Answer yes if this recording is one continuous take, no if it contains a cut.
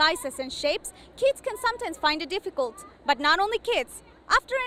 yes